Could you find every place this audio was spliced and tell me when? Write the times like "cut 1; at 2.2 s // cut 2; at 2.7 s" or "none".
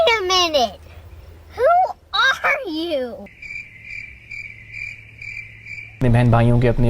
cut 1; at 3.3 s